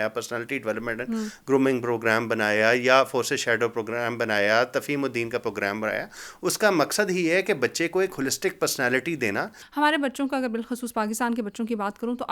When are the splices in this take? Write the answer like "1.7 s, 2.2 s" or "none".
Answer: 9.6 s